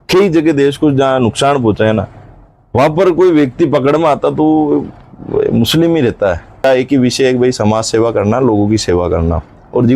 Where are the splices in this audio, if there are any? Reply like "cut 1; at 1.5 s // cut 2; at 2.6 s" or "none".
cut 1; at 6.6 s